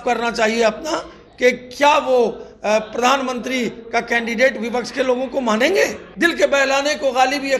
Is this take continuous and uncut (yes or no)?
no